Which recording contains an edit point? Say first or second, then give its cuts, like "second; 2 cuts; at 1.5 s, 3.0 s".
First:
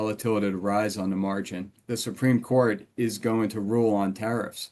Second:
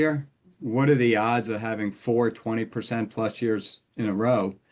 first; 1 cut; at 1.8 s